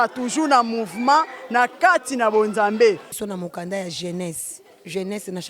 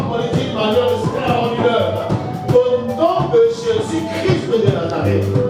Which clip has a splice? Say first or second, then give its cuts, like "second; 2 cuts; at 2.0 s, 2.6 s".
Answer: first; 1 cut; at 3.1 s